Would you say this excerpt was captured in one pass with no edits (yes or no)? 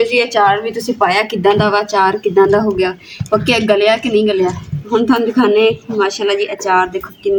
yes